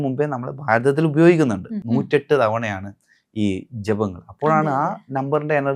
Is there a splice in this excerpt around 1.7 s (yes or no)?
yes